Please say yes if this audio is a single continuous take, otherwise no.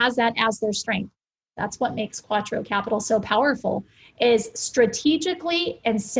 no